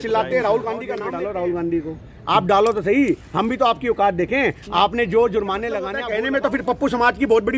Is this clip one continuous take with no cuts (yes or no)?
no